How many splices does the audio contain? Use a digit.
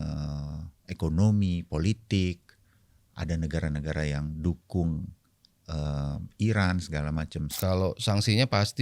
1